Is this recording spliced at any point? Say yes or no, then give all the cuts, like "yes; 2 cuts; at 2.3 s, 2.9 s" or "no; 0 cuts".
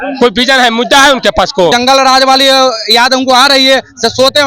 yes; 1 cut; at 1.7 s